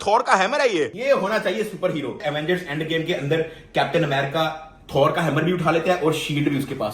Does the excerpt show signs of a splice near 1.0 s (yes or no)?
yes